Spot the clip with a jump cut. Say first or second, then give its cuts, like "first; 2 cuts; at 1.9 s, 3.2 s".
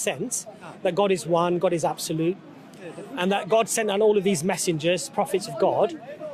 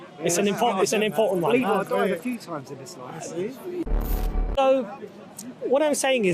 second; 1 cut; at 3.9 s